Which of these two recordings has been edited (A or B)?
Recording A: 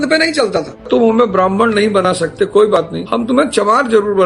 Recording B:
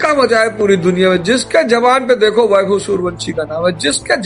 A